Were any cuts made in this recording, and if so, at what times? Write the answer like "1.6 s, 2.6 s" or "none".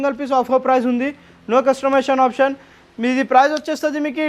none